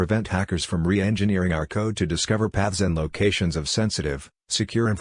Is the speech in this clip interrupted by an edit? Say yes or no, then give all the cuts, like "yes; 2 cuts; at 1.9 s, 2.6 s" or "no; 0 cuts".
no; 0 cuts